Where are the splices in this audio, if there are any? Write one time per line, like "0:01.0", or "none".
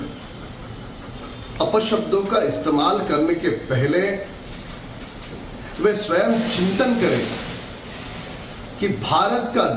0:07.1

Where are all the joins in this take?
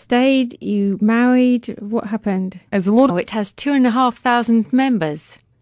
none

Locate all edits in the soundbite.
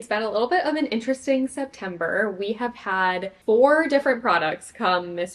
none

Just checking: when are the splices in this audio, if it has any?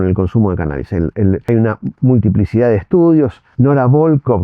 0:01.4
0:03.4

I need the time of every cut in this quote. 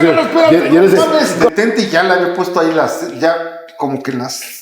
0:01.3

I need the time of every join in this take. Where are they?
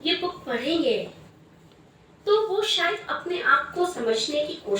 none

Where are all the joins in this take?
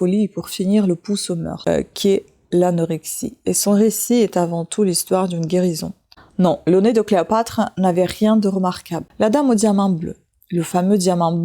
0:01.7
0:06.1
0:09.0

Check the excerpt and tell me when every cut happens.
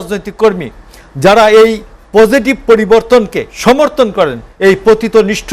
0:03.4
0:04.4

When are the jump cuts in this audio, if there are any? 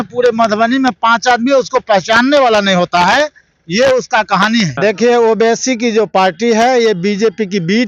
0:04.7

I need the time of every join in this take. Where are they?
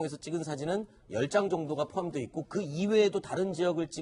none

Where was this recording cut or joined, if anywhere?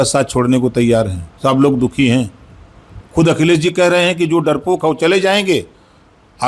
none

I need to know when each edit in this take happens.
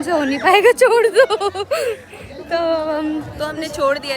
none

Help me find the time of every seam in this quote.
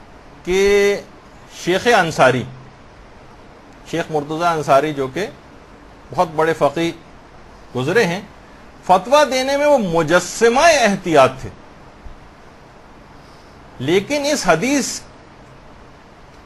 0:13.7

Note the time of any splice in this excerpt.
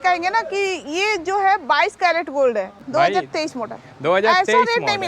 0:02.8

